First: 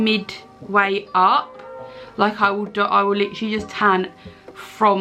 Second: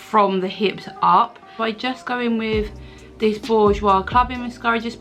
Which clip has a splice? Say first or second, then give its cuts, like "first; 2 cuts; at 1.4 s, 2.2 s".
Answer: second; 1 cut; at 1.5 s